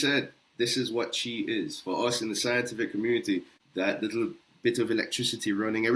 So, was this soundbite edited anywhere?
yes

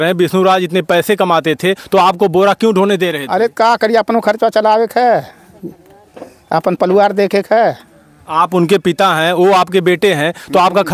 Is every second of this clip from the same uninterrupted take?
yes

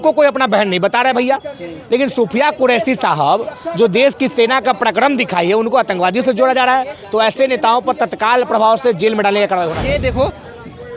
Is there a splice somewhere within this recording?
yes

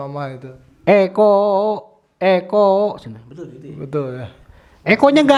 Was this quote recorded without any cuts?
yes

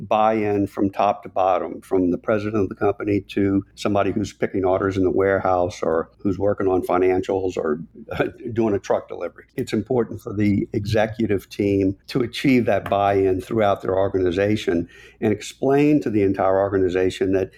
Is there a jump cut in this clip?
yes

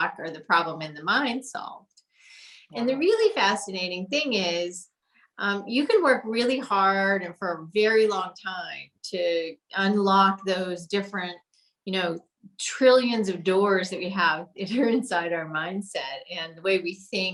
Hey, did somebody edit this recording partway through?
no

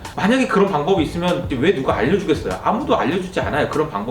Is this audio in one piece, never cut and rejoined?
no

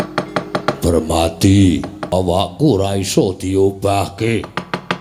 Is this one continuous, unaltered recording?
no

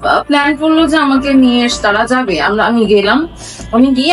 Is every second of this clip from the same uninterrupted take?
yes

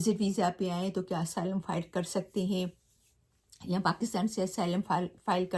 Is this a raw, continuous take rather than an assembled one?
yes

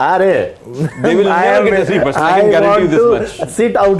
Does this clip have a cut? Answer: no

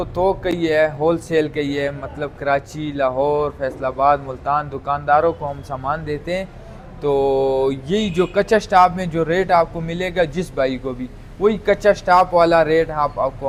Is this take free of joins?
yes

